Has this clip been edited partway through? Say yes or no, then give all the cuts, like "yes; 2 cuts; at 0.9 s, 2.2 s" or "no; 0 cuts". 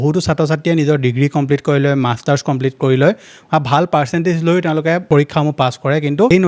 no; 0 cuts